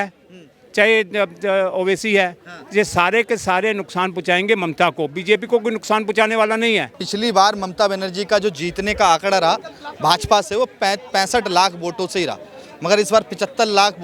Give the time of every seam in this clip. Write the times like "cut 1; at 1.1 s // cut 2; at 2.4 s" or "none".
none